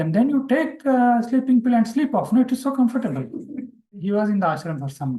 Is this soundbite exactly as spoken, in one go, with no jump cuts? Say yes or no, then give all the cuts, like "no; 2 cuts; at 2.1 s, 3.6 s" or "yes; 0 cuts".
no; 1 cut; at 3.9 s